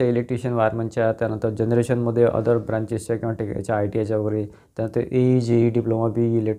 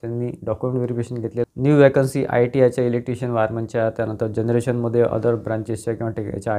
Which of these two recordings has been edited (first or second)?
second